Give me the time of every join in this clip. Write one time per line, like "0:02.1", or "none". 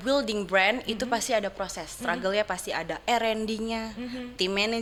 none